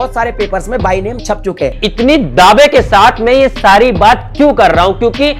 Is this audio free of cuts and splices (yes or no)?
no